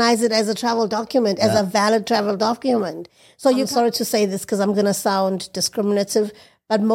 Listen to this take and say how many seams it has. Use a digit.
1